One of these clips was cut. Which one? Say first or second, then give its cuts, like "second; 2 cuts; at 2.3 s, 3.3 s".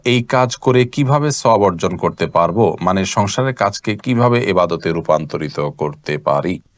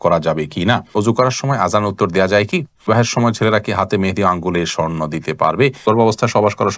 second; 3 cuts; at 0.9 s, 2.9 s, 5.8 s